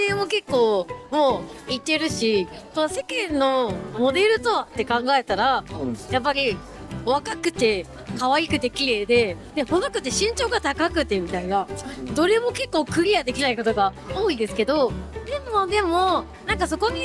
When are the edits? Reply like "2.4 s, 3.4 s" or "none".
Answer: none